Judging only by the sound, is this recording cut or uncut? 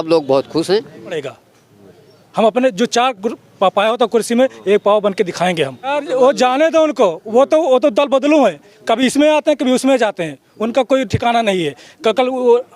cut